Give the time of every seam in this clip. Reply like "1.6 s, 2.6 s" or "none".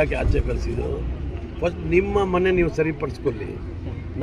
none